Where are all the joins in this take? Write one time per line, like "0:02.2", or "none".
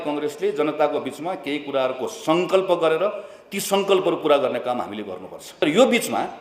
0:05.4

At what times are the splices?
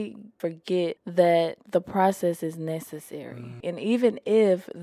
0:01.0
0:01.6
0:03.7

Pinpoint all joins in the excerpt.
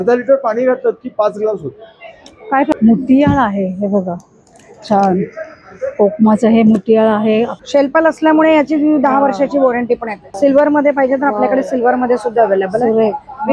0:02.7
0:07.6
0:10.2

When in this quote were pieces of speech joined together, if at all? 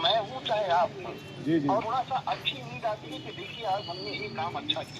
0:01.8

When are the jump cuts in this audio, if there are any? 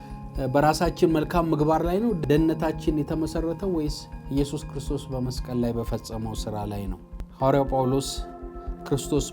0:02.2
0:07.2

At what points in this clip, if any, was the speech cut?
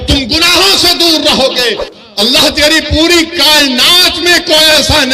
0:01.9

